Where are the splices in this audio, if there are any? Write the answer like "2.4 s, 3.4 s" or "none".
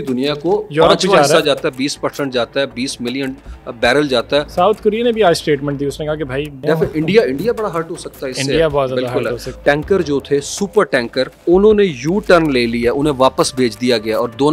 6.6 s, 9.5 s, 11.4 s